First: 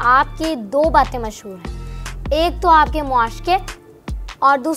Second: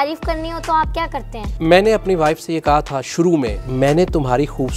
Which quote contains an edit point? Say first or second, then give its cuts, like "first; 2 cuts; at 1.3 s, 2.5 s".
second; 2 cuts; at 1.4 s, 3.7 s